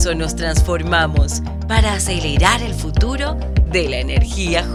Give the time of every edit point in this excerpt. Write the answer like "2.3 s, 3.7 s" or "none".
none